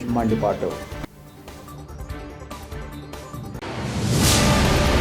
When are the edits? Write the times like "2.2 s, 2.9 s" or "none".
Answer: 3.7 s